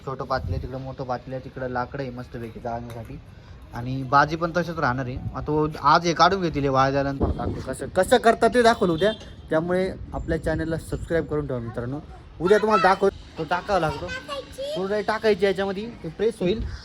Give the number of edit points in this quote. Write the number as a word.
two